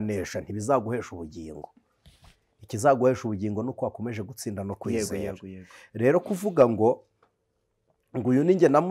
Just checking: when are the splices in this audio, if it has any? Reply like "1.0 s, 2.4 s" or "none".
none